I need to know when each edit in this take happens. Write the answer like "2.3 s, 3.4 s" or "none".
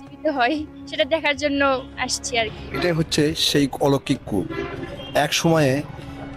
2.6 s